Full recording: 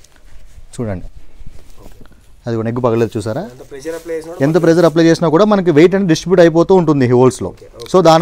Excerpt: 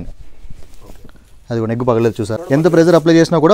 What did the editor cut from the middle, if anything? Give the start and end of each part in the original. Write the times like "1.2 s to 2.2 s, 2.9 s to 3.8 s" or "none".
3.4 s to 4.3 s